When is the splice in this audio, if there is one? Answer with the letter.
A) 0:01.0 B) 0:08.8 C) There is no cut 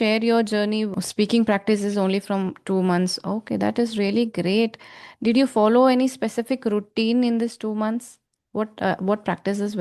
A